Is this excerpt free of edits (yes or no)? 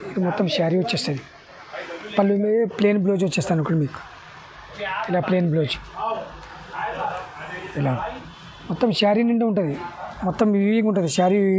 yes